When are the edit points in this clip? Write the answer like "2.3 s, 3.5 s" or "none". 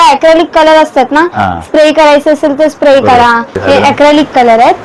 3.5 s

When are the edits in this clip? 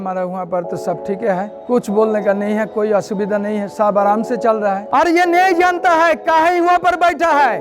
1.6 s, 4.8 s

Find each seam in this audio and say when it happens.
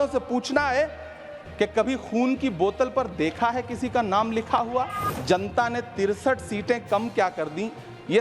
5.1 s

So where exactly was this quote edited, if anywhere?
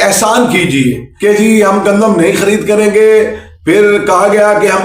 1.1 s

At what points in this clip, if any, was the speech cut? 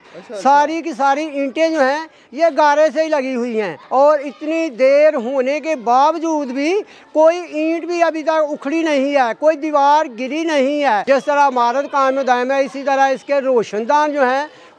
3.8 s, 11.0 s

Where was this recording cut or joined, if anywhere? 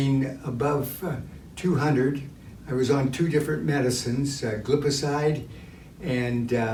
none

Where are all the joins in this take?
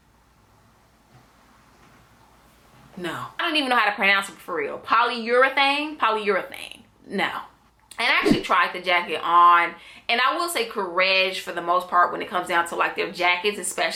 none

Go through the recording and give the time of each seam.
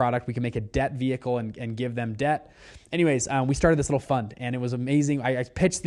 none

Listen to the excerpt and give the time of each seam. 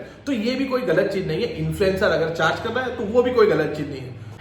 none

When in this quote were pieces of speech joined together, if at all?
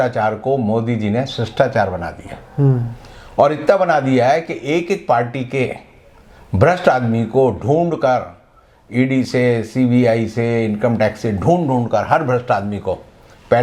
none

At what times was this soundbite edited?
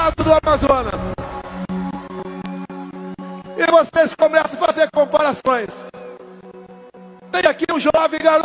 none

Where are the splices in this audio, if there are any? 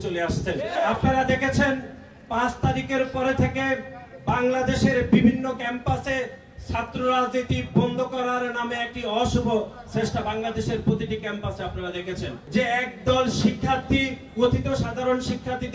0.8 s, 12.3 s

